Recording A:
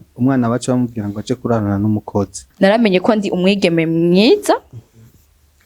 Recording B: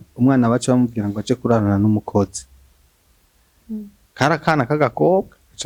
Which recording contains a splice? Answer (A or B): A